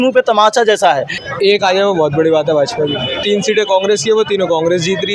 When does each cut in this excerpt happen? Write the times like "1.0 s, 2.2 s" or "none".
1.2 s, 3.2 s